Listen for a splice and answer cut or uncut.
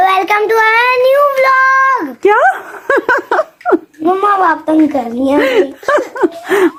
uncut